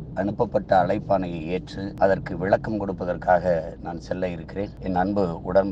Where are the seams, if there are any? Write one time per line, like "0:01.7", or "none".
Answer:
0:01.8
0:04.8